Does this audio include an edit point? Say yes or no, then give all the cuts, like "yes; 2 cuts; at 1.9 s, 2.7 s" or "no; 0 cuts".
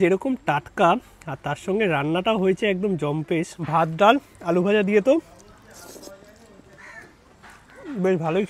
yes; 1 cut; at 3.6 s